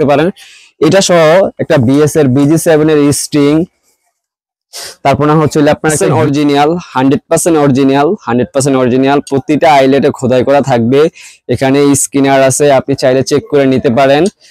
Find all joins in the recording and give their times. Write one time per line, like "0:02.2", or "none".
0:06.0